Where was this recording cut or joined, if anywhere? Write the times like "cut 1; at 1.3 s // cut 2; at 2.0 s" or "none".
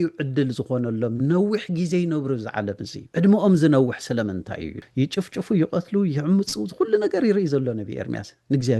cut 1; at 2.9 s // cut 2; at 4.8 s